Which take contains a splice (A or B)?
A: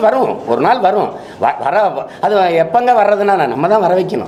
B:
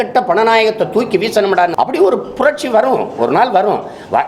B